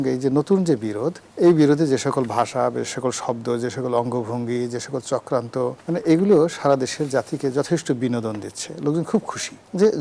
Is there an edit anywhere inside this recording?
no; 0 cuts

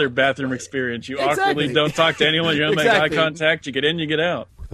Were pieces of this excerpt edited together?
no; 0 cuts

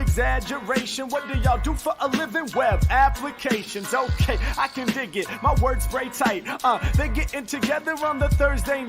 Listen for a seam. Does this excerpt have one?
yes; 1 cut; at 5.1 s

